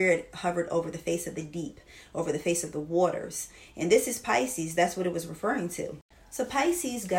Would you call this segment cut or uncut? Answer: uncut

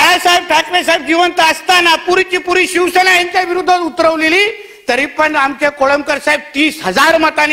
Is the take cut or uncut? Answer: uncut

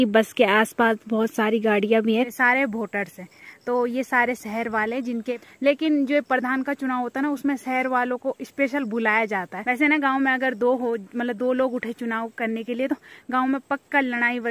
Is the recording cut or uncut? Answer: cut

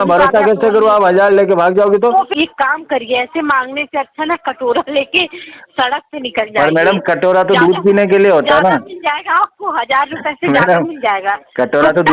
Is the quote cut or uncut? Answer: cut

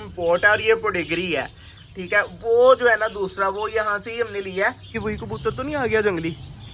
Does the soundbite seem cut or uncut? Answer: cut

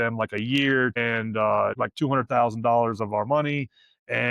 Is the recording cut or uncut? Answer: cut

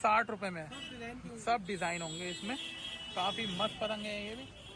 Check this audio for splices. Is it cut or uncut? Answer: uncut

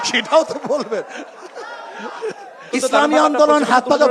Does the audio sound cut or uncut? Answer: cut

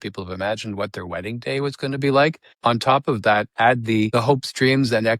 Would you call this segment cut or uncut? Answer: cut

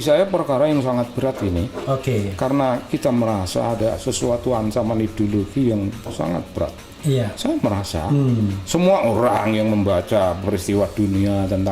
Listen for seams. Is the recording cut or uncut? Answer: uncut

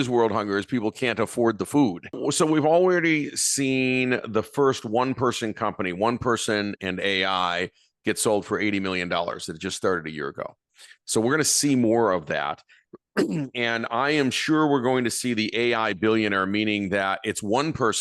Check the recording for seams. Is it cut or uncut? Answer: cut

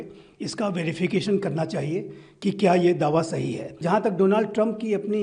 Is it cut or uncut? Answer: cut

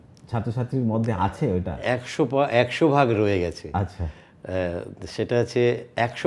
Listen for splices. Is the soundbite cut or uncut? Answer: uncut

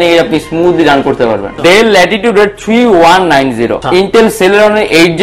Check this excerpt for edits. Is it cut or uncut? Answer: cut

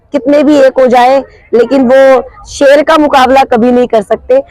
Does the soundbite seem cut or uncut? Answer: uncut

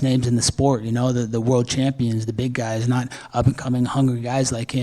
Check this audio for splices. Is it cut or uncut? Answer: uncut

